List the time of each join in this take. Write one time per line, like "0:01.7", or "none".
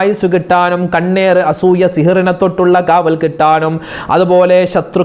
none

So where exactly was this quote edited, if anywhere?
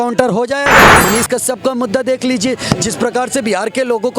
0:01.0

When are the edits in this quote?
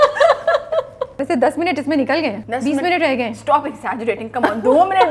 0:01.2
0:02.4

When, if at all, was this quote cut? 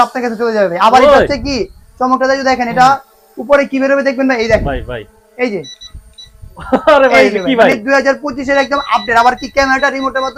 none

